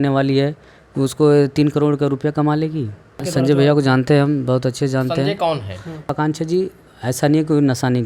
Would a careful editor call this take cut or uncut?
cut